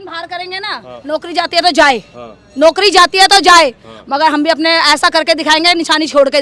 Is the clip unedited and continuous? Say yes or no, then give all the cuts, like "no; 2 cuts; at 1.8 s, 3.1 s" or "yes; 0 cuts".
yes; 0 cuts